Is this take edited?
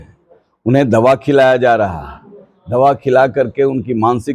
no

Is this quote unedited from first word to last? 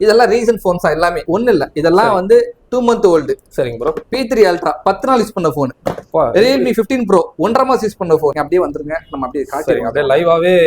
no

